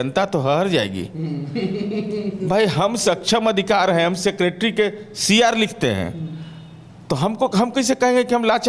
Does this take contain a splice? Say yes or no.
no